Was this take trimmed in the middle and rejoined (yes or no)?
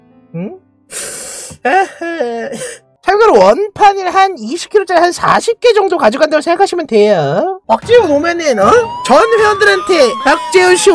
yes